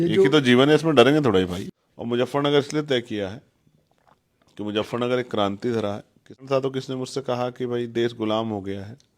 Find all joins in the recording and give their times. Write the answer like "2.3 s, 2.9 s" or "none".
1.6 s, 6.4 s